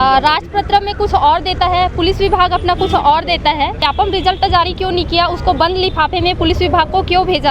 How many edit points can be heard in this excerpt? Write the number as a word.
one